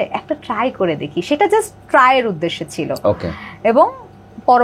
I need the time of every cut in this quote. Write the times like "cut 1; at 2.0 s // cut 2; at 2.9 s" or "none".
none